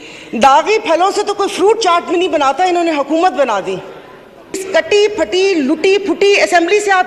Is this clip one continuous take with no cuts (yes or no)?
no